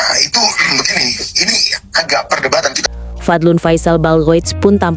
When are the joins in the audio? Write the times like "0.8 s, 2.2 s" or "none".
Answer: 2.8 s

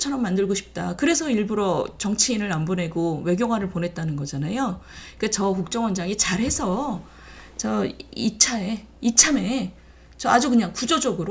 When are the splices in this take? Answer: none

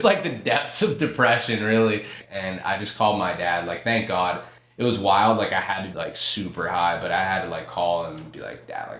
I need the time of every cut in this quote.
2.2 s, 5.9 s

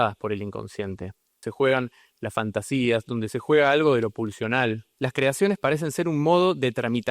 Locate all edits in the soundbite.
1.4 s, 4.9 s

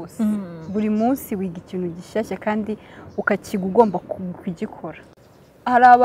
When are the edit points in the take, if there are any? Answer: 5.0 s

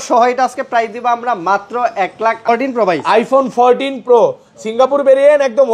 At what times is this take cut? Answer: 2.5 s

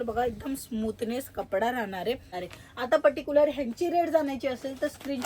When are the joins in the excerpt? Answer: 2.3 s

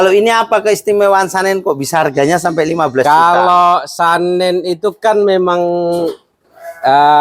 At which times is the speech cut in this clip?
none

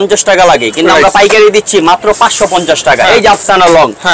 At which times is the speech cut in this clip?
3.0 s

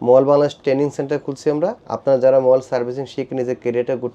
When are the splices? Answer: 1.9 s

